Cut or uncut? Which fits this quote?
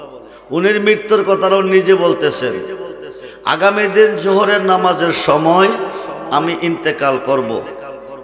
uncut